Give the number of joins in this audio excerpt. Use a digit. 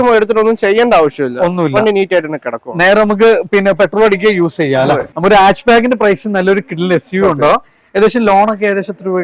1